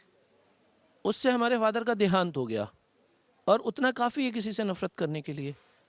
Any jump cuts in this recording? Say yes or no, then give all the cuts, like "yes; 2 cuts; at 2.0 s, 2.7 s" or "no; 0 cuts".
no; 0 cuts